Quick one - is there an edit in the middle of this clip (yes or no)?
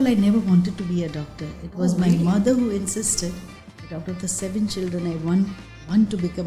no